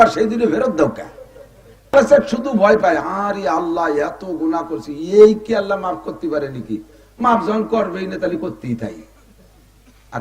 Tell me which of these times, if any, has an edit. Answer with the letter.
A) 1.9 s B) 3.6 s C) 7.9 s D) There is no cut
A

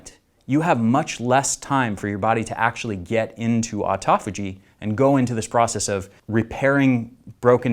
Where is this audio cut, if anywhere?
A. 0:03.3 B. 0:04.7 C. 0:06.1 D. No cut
C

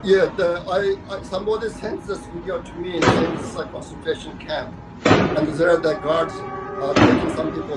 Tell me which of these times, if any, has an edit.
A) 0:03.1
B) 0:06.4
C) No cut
C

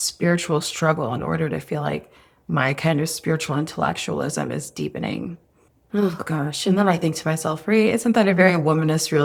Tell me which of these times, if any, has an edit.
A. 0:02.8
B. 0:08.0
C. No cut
C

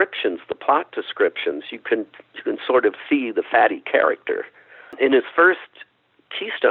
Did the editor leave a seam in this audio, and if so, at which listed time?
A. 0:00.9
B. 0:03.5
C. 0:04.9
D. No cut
C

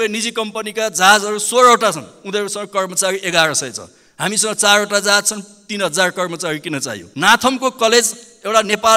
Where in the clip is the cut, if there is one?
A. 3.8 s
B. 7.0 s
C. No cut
B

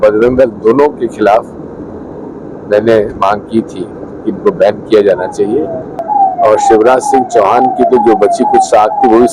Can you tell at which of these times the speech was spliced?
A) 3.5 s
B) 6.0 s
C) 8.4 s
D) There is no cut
B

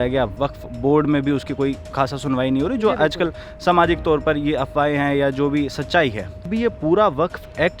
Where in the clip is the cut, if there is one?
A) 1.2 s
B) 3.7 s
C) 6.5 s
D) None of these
C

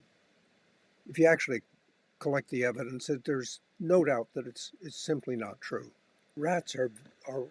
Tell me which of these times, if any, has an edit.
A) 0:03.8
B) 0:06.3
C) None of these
B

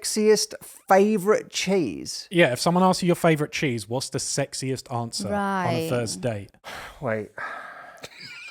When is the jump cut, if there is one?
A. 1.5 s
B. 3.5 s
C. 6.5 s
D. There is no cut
D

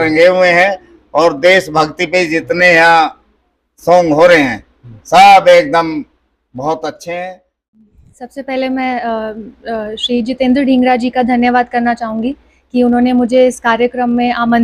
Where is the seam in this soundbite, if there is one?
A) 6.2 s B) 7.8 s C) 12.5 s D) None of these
B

